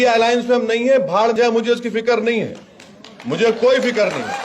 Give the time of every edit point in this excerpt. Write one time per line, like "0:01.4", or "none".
0:01.4